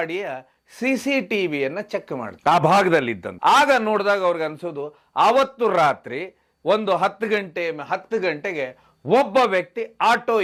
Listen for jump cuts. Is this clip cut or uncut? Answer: uncut